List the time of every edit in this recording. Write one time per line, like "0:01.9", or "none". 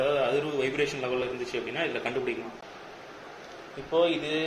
0:02.7